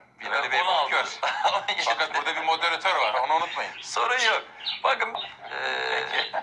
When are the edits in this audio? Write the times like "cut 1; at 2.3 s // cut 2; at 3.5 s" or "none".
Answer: cut 1; at 5.2 s